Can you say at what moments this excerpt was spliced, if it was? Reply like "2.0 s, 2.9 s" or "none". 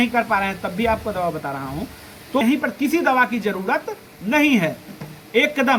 none